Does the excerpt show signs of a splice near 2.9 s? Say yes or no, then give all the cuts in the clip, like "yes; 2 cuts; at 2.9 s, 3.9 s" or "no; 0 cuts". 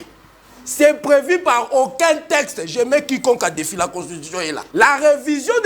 no; 1 cut; at 4.6 s